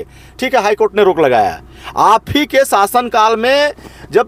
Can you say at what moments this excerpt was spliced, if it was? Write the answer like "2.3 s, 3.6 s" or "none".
none